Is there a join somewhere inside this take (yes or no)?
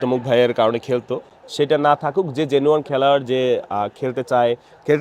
no